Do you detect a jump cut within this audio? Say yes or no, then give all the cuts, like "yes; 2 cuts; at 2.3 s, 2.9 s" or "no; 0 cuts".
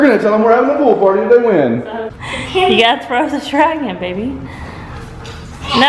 yes; 1 cut; at 2.0 s